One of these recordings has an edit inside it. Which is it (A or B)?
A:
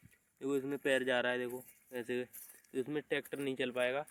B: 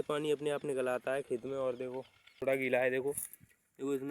B